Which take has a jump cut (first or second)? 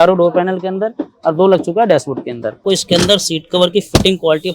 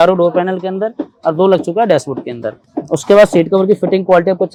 first